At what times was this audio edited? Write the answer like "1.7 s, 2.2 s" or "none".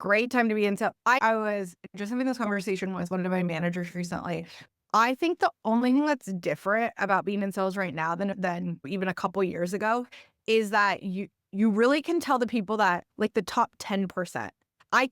1.2 s, 8.5 s